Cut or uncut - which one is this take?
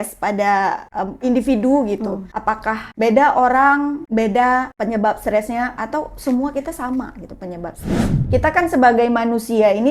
cut